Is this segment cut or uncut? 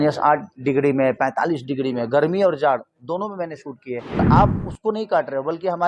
cut